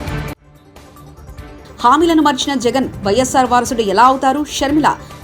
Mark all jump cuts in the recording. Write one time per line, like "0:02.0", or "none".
none